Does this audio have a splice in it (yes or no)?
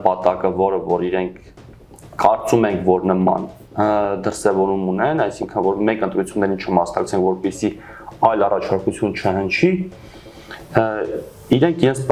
no